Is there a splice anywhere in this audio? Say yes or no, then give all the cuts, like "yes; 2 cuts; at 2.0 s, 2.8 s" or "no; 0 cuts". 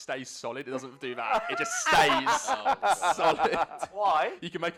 no; 0 cuts